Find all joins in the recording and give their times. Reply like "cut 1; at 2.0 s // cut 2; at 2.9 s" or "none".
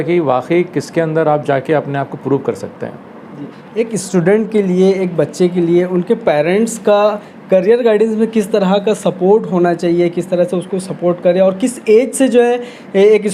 none